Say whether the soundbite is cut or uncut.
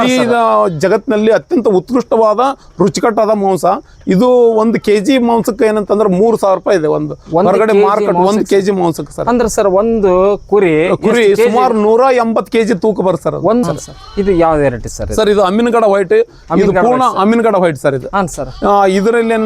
cut